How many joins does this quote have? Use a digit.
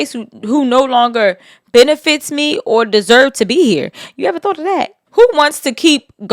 1